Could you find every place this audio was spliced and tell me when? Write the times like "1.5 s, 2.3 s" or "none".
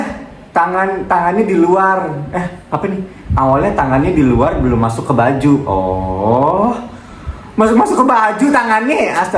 none